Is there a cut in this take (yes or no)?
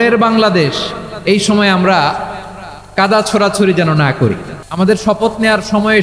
yes